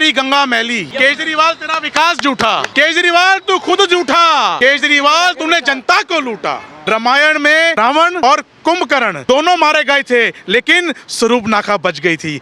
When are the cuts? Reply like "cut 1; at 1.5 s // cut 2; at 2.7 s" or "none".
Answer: cut 1; at 0.9 s // cut 2; at 2.7 s // cut 3; at 4.6 s // cut 4; at 6.7 s // cut 5; at 8.0 s // cut 6; at 9.2 s